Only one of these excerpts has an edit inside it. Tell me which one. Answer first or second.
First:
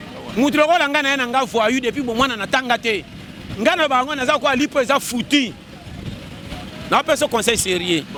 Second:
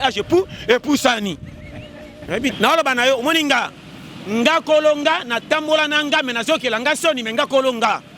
second